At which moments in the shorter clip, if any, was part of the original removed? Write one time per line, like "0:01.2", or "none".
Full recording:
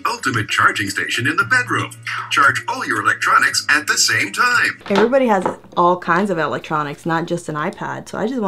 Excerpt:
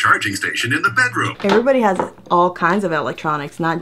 0:01.3